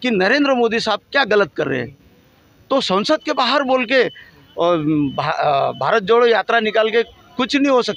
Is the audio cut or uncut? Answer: uncut